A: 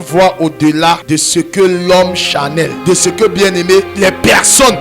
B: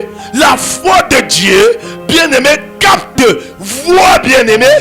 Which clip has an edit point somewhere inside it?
A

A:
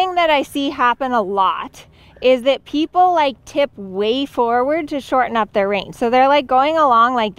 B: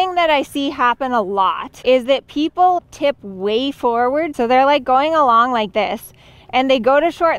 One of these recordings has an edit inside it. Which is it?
B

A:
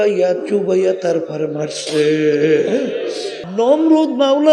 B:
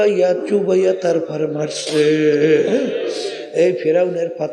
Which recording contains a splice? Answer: A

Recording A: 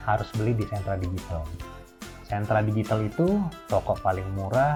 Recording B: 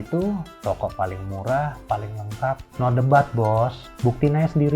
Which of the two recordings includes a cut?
B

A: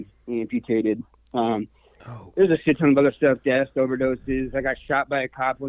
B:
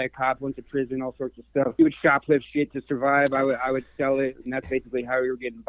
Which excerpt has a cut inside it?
B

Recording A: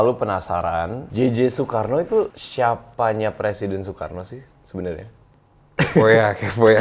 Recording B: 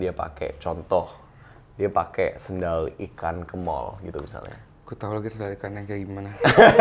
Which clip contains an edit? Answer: A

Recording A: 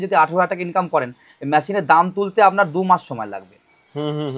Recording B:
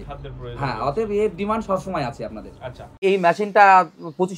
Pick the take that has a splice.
B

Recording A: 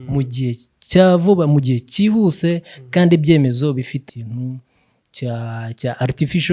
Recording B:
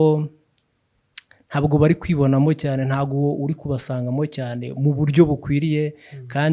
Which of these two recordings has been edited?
A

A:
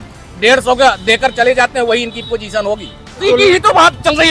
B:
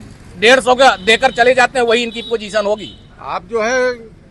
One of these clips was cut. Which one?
A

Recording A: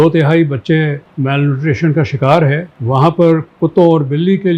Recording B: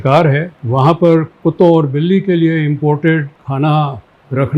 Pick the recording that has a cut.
B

